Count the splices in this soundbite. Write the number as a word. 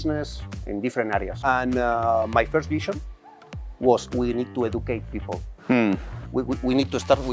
one